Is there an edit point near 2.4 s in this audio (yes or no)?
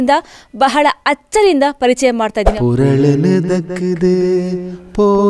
yes